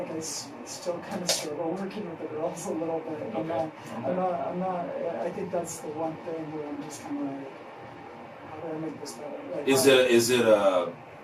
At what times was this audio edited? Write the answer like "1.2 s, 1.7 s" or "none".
none

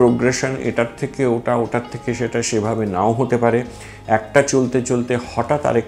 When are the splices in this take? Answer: none

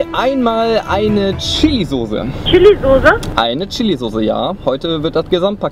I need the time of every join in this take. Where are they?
2.4 s

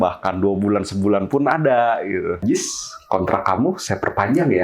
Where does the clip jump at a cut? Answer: 2.4 s

